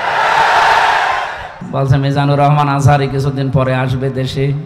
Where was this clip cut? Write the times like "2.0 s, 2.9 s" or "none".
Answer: 1.6 s